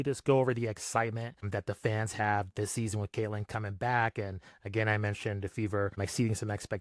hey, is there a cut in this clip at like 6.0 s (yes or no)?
yes